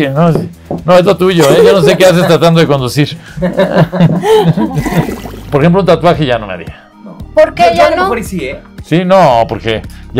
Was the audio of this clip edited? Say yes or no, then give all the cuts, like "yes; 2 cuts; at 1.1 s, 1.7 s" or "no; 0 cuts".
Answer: yes; 1 cut; at 5.1 s